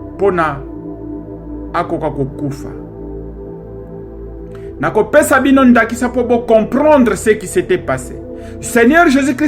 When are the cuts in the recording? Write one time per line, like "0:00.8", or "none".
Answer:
0:02.5
0:04.8